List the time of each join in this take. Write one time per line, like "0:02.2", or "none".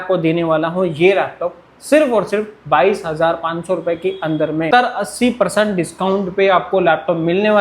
0:04.7